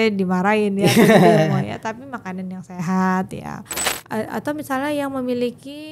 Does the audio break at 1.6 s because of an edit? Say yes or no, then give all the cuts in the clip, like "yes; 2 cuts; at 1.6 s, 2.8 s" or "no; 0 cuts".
no; 1 cut; at 3.9 s